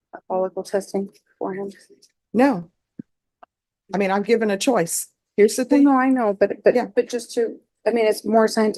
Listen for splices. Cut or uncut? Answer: uncut